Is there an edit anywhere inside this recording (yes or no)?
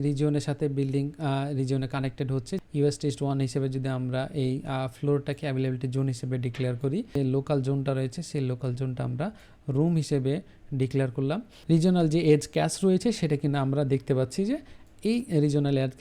yes